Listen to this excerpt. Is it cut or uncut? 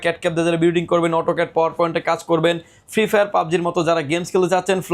uncut